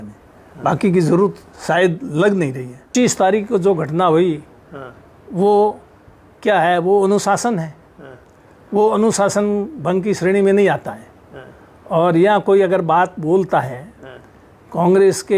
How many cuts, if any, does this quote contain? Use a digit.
1